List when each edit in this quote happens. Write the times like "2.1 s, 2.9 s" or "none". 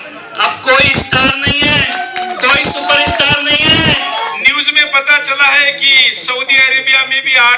4.3 s